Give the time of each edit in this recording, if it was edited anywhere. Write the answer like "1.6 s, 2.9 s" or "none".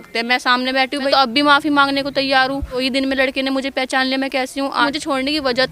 1.1 s, 2.8 s, 4.8 s